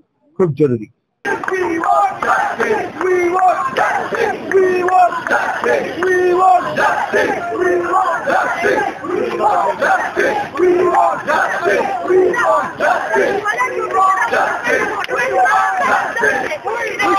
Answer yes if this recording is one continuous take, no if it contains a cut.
no